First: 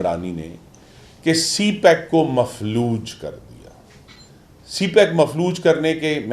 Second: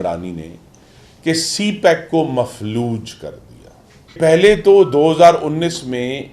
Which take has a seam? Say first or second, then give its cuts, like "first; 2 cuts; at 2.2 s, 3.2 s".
second; 1 cut; at 4.2 s